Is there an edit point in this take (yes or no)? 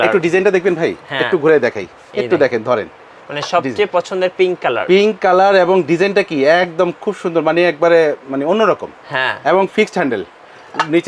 no